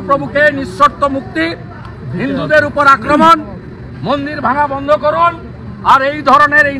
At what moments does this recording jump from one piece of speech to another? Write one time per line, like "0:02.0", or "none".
none